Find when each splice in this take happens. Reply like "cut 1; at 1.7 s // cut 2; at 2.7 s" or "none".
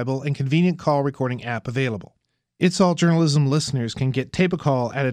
none